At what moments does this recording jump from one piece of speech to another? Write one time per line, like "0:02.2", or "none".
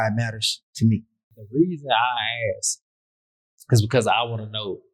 0:01.3